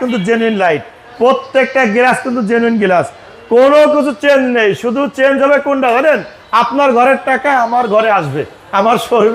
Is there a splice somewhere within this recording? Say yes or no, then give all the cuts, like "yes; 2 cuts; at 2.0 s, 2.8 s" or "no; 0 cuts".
no; 0 cuts